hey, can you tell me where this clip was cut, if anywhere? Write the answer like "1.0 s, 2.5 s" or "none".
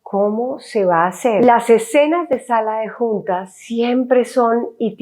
1.4 s